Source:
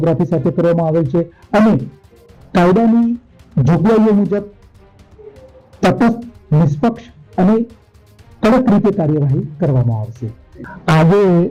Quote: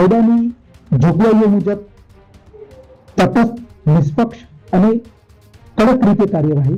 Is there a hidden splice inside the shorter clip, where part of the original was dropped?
no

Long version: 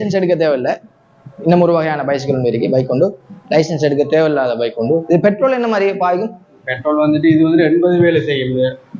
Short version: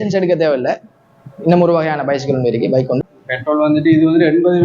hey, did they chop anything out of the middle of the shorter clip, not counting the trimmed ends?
yes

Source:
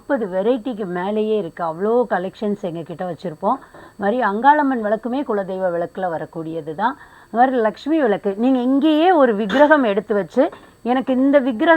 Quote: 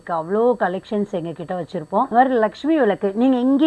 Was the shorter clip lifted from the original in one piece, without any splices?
no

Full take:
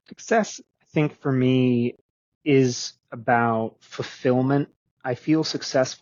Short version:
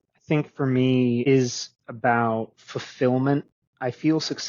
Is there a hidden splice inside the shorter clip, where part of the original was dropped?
yes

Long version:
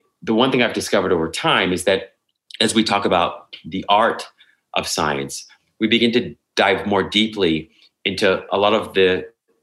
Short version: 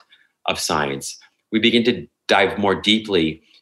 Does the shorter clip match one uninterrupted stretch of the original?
yes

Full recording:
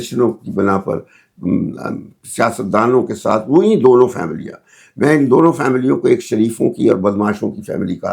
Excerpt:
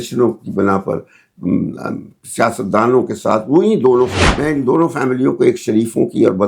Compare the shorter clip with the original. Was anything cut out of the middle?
yes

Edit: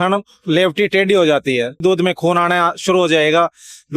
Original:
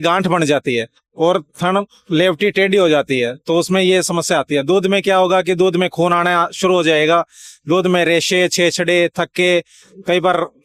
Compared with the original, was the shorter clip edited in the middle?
yes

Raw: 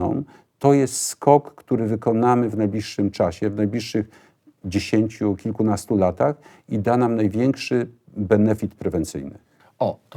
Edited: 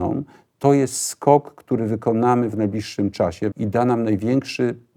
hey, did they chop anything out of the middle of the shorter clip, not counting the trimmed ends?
yes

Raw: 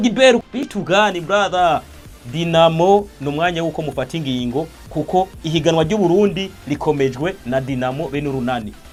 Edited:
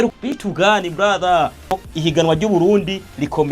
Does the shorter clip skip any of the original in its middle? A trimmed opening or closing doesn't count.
yes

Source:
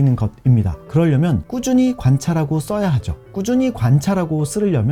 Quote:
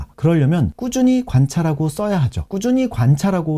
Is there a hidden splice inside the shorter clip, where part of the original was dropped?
yes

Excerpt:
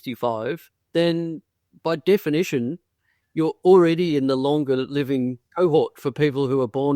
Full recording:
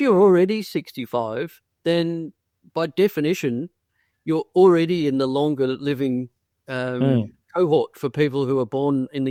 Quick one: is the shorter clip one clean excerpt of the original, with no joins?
no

